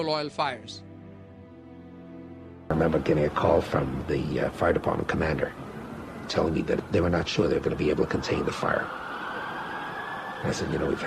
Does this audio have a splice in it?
yes; 1 cut; at 2.6 s

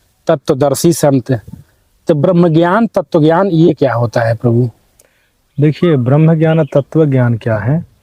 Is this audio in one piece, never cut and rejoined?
yes; 0 cuts

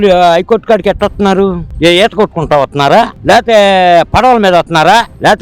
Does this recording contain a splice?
no; 0 cuts

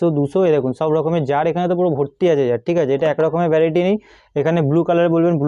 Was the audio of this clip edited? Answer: no; 0 cuts

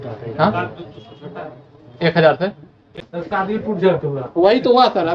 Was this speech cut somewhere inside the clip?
yes; 1 cut; at 3.0 s

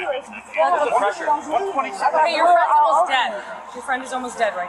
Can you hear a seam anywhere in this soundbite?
no; 0 cuts

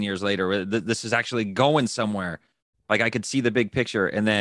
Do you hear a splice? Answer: no; 0 cuts

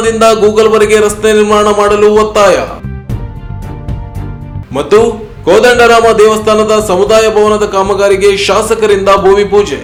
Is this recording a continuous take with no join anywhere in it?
yes; 0 cuts

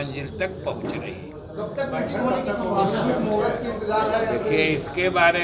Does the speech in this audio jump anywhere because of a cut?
no; 0 cuts

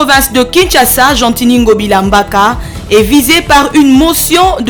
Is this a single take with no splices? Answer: yes; 0 cuts

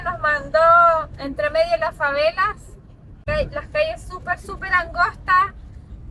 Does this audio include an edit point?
no; 0 cuts

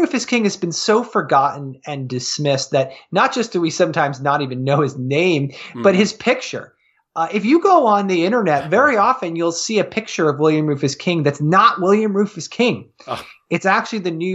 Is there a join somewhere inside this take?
no; 0 cuts

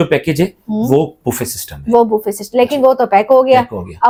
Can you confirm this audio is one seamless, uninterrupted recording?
yes; 0 cuts

